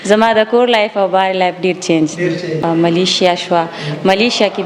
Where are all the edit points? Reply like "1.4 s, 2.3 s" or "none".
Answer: 2.6 s